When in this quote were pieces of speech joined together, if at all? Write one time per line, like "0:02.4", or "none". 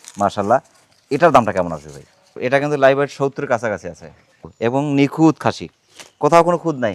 0:02.2